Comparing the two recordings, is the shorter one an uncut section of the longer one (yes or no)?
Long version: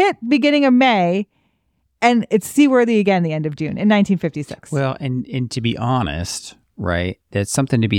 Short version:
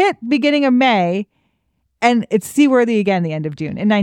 yes